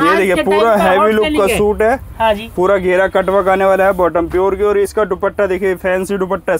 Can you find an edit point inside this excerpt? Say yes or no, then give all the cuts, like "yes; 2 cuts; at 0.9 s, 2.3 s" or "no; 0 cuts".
no; 0 cuts